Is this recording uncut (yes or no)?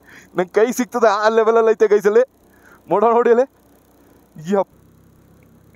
no